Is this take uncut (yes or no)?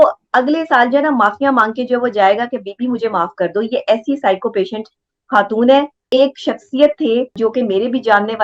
no